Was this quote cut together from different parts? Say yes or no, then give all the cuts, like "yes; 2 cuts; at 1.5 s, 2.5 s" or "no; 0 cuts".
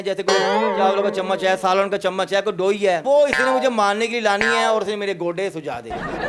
yes; 1 cut; at 3.0 s